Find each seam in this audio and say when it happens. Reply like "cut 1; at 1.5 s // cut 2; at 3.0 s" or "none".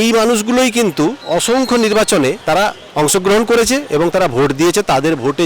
cut 1; at 1.2 s // cut 2; at 2.4 s